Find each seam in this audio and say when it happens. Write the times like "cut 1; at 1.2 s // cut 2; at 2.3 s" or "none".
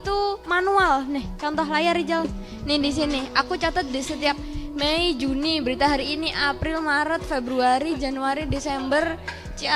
none